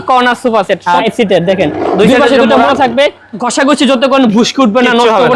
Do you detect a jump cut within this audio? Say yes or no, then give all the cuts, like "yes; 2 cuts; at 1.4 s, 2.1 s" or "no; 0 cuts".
yes; 2 cuts; at 1.0 s, 3.5 s